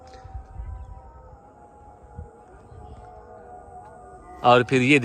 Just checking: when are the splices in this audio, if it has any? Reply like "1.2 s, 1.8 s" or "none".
none